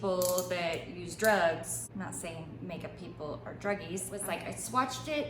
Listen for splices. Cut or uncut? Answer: cut